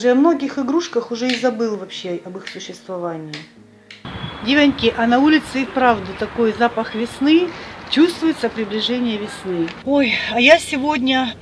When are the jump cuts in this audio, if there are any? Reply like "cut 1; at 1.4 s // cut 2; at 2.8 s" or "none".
cut 1; at 4.0 s // cut 2; at 9.8 s